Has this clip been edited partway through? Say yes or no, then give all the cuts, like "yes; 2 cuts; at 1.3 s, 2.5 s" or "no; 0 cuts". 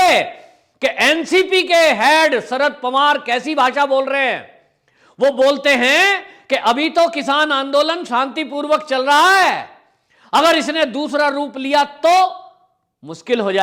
no; 0 cuts